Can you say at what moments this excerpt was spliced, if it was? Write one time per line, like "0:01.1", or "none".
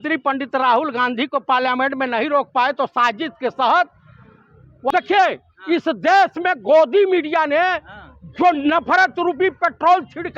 0:04.9